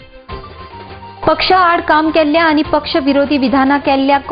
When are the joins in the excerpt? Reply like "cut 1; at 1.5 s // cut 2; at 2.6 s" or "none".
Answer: cut 1; at 1.1 s

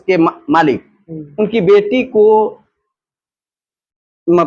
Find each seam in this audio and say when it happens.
none

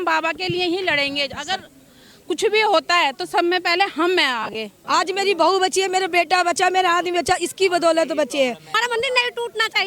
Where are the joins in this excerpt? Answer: cut 1; at 4.7 s // cut 2; at 8.8 s

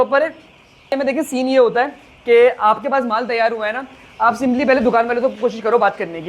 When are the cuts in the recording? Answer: cut 1; at 0.9 s

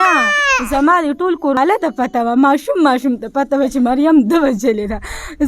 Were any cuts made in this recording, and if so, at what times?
cut 1; at 1.6 s

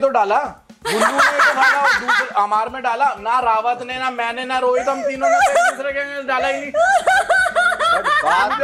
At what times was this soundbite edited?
none

